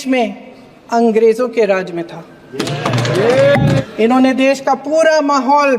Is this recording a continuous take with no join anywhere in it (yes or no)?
no